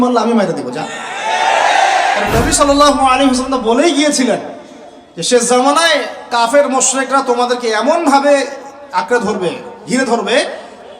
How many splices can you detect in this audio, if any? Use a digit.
1